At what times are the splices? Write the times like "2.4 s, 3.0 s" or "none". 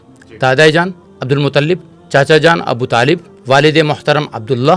1.1 s, 1.9 s, 3.3 s